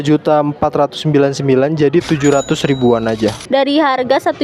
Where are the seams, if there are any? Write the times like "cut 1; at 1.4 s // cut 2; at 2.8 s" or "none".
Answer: cut 1; at 3.4 s